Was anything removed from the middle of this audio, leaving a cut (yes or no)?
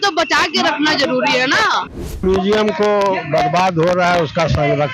yes